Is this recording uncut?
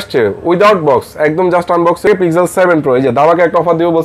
no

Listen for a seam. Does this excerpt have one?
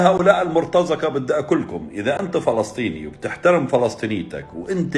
no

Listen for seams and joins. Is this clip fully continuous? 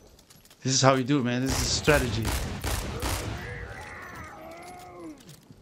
yes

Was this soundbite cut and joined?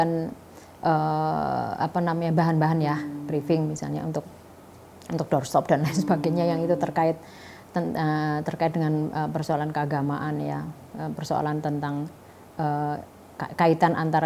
no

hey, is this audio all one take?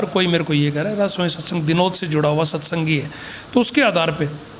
yes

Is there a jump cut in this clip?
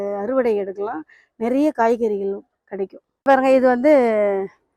yes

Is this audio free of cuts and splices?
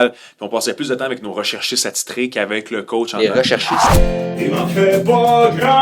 no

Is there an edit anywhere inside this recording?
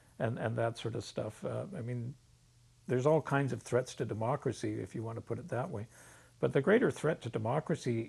no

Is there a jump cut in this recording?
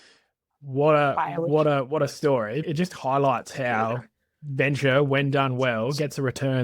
yes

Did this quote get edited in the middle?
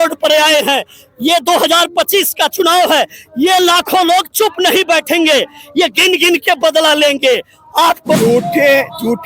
yes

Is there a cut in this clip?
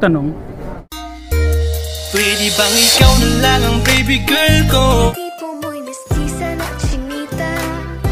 yes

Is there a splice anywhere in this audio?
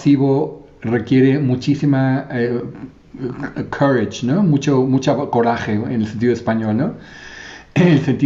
no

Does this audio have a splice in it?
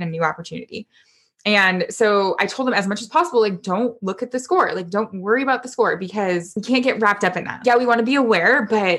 yes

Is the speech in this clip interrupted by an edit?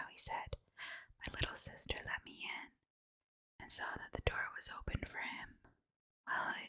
yes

